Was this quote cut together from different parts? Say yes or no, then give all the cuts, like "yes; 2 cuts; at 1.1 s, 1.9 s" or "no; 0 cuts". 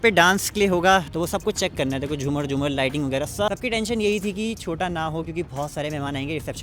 yes; 2 cuts; at 1.1 s, 3.5 s